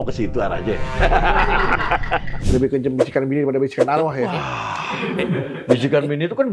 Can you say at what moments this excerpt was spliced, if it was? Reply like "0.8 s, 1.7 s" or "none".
2.4 s